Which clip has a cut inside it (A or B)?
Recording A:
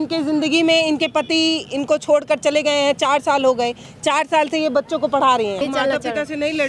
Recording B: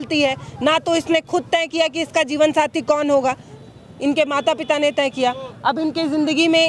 A